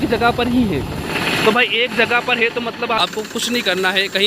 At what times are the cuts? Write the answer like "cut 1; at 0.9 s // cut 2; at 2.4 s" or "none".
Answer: cut 1; at 3.0 s